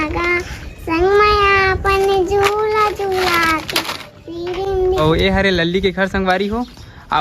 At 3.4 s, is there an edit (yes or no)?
no